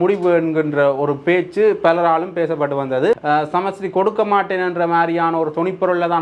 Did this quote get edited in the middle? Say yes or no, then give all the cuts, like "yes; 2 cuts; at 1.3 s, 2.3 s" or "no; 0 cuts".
yes; 1 cut; at 3.2 s